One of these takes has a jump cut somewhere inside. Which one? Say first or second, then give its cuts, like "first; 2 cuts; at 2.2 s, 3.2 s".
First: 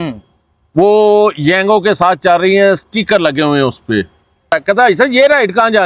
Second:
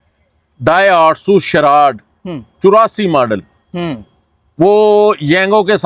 first; 1 cut; at 4.5 s